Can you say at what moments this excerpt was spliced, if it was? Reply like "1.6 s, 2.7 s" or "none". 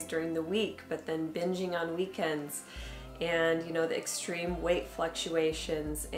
none